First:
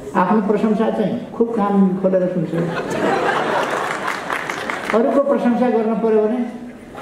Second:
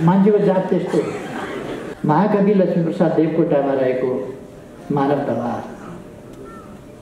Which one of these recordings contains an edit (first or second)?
second